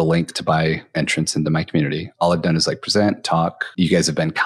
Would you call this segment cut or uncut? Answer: cut